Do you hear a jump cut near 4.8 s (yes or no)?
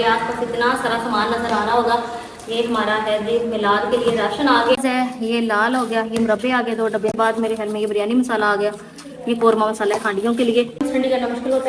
yes